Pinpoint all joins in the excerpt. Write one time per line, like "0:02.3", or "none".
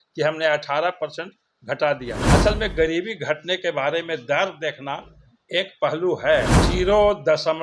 0:02.1
0:06.6